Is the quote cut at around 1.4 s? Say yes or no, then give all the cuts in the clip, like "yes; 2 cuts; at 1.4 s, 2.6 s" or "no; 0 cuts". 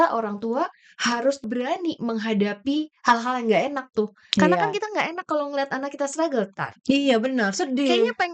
yes; 1 cut; at 1.4 s